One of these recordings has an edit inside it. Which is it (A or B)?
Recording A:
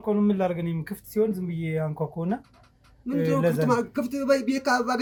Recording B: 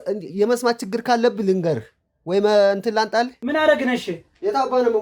B